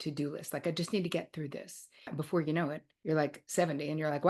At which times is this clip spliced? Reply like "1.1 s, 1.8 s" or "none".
2.1 s, 3.2 s